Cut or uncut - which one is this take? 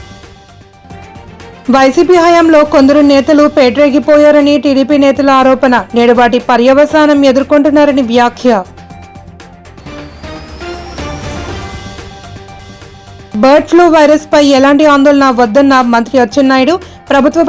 uncut